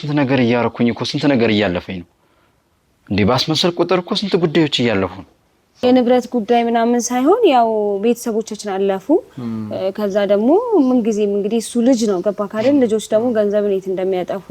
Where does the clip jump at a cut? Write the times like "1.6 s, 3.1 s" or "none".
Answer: 5.8 s